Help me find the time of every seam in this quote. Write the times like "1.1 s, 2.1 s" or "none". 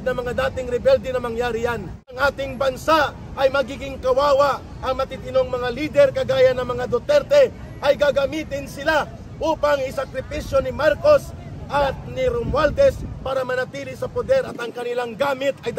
2.2 s